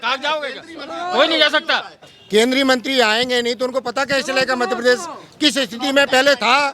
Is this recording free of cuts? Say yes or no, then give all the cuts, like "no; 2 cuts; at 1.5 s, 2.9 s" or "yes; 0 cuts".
no; 1 cut; at 2.0 s